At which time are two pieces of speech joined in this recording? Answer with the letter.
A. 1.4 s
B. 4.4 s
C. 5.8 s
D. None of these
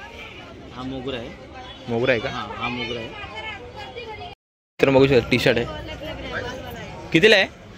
B